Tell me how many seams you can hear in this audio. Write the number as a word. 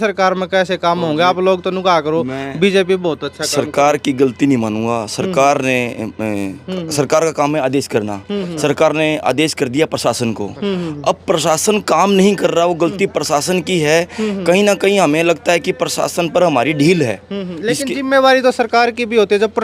zero